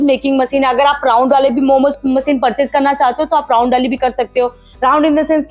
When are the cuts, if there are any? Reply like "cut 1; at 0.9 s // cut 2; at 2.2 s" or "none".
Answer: none